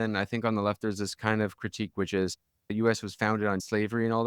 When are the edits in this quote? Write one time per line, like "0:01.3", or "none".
none